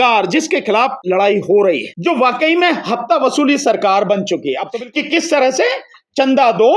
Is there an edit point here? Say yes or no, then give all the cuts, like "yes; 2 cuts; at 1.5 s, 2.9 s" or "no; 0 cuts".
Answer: yes; 3 cuts; at 1.0 s, 1.9 s, 4.7 s